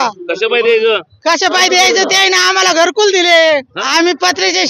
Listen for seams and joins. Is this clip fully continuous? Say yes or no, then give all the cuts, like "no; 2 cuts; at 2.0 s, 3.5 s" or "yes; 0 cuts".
no; 1 cut; at 3.7 s